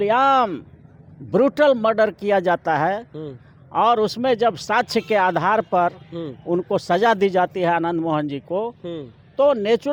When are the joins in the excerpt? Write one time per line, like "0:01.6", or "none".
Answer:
none